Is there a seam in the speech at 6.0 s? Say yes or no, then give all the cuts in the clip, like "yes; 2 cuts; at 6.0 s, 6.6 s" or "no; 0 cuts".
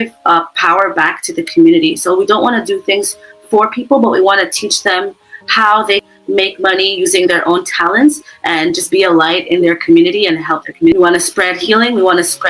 yes; 2 cuts; at 6.0 s, 10.9 s